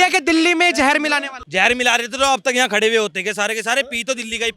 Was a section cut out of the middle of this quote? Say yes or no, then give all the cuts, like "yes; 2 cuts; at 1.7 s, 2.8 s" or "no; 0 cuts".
yes; 1 cut; at 1.4 s